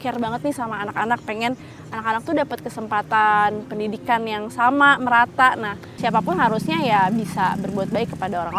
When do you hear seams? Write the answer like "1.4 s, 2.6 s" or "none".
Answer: 5.9 s